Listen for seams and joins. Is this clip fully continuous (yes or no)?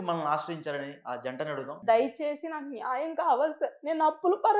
no